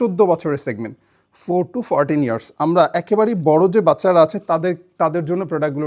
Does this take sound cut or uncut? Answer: uncut